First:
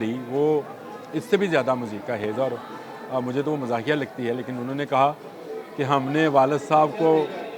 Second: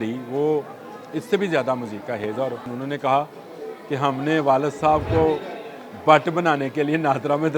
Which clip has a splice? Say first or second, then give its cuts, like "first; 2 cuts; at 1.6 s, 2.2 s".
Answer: second; 1 cut; at 2.7 s